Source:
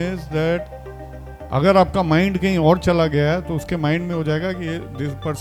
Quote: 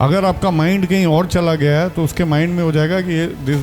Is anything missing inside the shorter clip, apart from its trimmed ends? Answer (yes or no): no